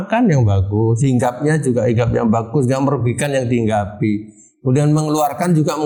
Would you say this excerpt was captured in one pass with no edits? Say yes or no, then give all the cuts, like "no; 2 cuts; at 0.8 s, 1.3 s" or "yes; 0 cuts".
yes; 0 cuts